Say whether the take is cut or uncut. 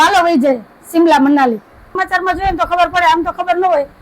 cut